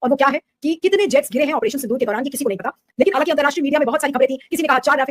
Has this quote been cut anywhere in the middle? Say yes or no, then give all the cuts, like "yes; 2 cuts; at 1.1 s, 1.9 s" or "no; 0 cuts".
yes; 1 cut; at 3.1 s